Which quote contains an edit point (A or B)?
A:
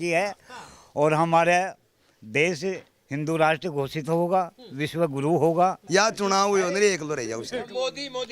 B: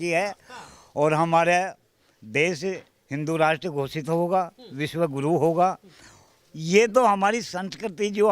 A